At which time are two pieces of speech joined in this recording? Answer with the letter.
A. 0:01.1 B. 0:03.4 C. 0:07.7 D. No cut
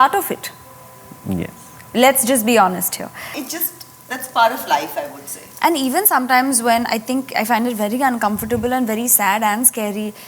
B